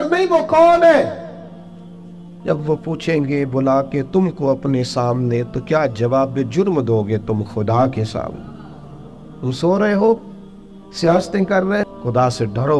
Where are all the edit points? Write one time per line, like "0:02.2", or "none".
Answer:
0:11.9